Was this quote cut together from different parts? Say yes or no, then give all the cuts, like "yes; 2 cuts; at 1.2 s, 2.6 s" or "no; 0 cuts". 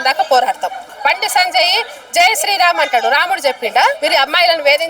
yes; 2 cuts; at 0.9 s, 4.0 s